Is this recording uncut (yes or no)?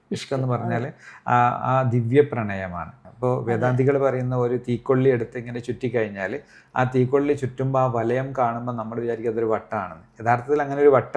no